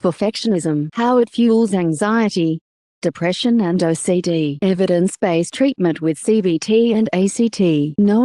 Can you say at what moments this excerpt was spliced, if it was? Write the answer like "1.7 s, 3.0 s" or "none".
6.6 s